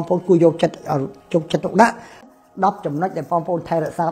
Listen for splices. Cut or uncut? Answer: cut